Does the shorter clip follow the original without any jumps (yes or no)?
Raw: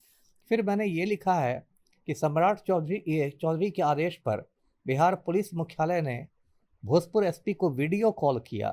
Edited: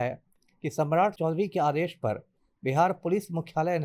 no